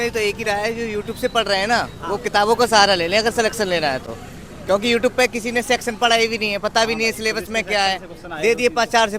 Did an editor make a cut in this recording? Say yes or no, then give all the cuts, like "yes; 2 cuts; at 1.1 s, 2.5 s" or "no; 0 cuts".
no; 0 cuts